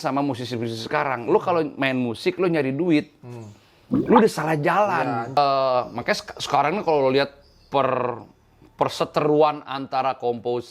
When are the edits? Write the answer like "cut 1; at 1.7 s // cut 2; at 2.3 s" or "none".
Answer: cut 1; at 5.4 s